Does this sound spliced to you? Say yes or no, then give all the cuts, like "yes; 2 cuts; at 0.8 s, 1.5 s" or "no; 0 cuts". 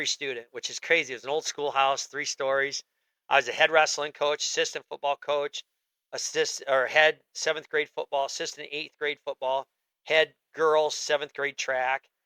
no; 0 cuts